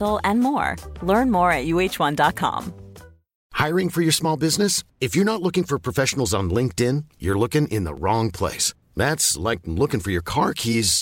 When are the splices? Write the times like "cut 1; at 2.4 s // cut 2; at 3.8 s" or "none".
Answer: cut 1; at 3.3 s